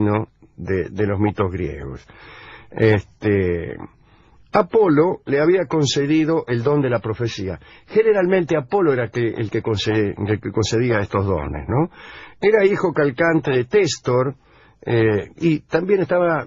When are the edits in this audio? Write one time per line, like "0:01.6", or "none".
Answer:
0:09.1

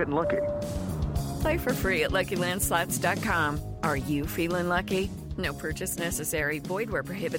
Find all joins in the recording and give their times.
none

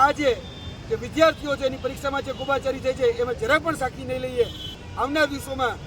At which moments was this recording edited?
0:04.7

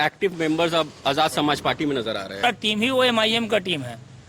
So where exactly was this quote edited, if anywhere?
0:02.4

